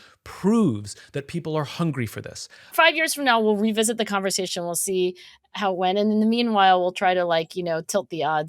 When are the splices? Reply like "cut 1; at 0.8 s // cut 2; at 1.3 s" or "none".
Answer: cut 1; at 2.7 s